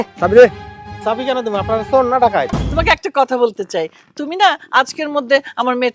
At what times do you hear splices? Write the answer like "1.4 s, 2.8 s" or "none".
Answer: 2.6 s